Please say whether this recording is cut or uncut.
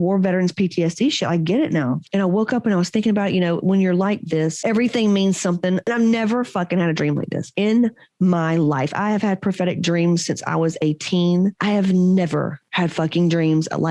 uncut